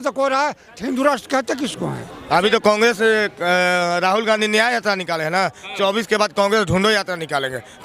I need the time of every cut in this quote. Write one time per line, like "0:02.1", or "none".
0:02.0